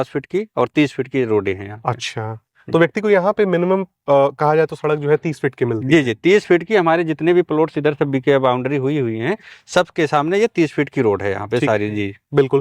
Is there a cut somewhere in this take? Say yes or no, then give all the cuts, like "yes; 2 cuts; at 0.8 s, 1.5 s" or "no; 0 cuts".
no; 0 cuts